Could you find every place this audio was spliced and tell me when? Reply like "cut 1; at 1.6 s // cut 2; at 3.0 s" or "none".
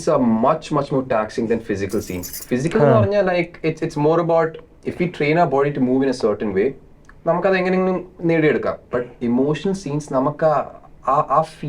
none